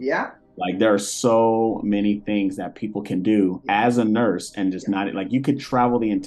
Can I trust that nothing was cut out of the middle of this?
no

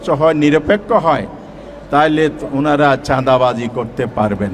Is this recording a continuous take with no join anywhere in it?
yes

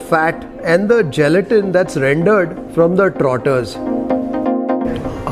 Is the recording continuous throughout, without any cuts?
yes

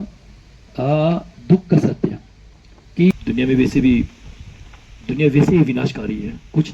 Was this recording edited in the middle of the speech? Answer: yes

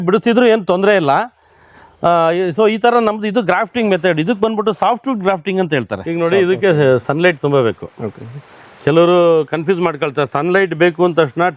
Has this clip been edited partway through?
yes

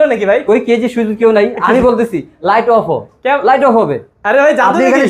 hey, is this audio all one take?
yes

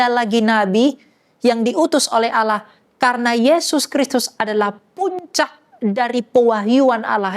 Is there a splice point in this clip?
no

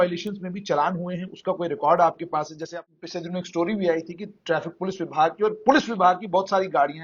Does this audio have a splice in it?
yes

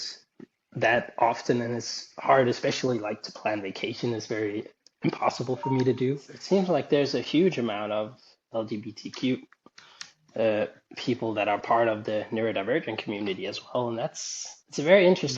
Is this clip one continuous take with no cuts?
no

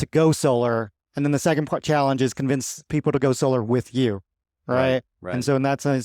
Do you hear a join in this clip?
no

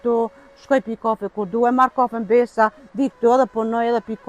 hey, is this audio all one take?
yes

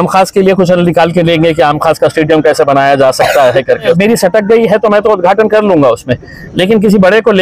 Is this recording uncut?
no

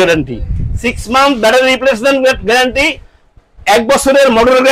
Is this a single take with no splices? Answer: yes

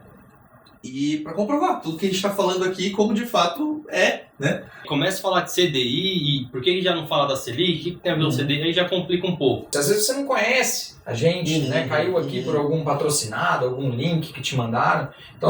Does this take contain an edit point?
yes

